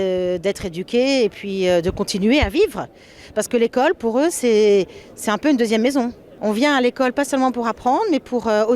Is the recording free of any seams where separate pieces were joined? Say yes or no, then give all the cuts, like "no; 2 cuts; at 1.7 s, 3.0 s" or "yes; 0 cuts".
no; 1 cut; at 6.2 s